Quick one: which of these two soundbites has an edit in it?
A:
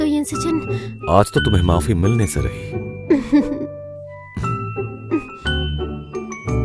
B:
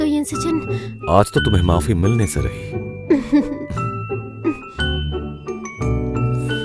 B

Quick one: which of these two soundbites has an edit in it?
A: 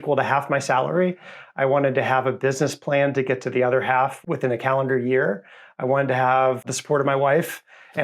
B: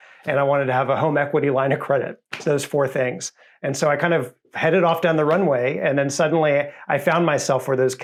A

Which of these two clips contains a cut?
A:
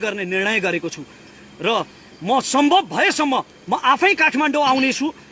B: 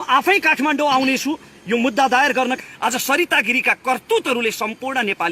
B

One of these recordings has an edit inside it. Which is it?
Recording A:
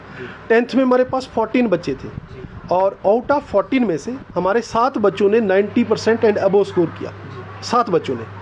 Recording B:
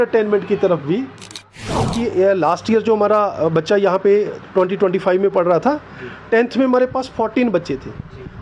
B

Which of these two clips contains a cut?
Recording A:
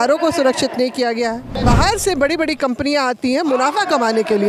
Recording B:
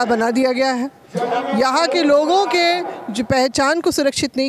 A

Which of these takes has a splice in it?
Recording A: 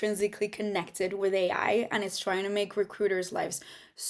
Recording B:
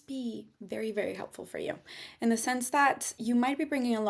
B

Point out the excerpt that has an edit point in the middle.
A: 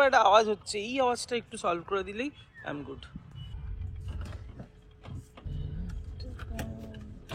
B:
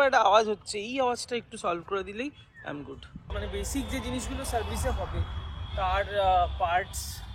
B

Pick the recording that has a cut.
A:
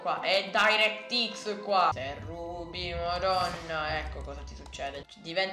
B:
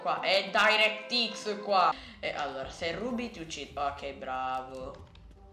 A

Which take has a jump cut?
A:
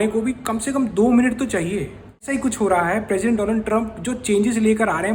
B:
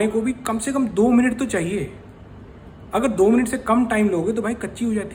A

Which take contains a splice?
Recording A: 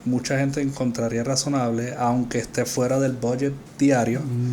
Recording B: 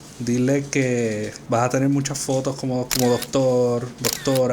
A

